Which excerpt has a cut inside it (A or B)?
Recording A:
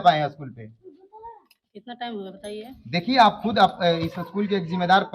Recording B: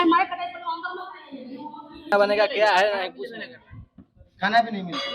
B